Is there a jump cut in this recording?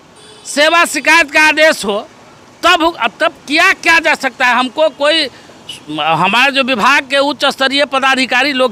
no; 0 cuts

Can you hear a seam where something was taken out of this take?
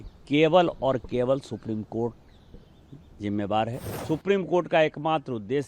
yes; 1 cut; at 3.9 s

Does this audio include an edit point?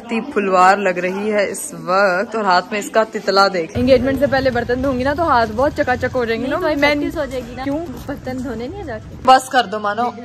yes; 3 cuts; at 3.7 s, 7.6 s, 9.2 s

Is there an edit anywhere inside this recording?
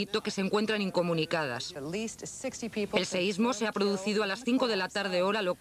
yes; 1 cut; at 2.9 s

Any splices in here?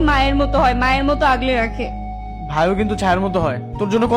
no; 0 cuts

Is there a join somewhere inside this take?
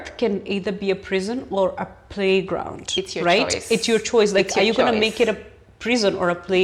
no; 0 cuts

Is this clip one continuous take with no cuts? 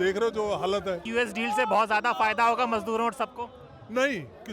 no; 1 cut; at 1.1 s

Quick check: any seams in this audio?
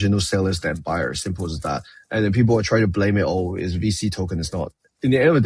no; 0 cuts

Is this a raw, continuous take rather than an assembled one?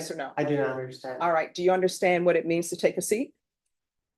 yes; 0 cuts

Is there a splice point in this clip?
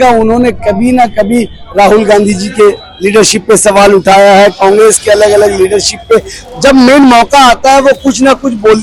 no; 0 cuts

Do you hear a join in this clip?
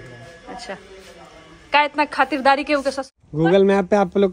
yes; 1 cut; at 3.0 s

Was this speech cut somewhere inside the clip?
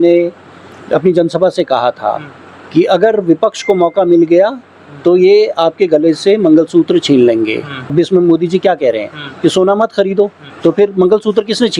yes; 2 cuts; at 7.8 s, 10.4 s

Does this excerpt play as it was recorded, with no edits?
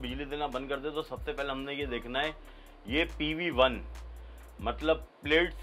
yes; 0 cuts

